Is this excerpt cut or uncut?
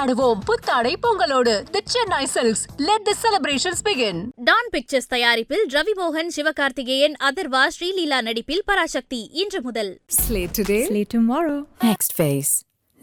uncut